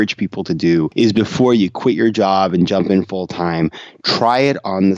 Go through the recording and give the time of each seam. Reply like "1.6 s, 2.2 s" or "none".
0.9 s